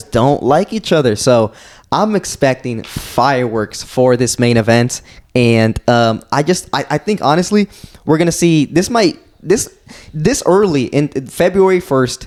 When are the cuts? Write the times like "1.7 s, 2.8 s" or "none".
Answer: none